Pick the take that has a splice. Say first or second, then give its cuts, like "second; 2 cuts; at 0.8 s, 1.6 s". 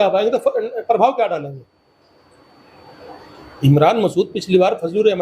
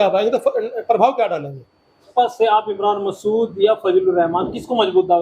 second; 1 cut; at 2.1 s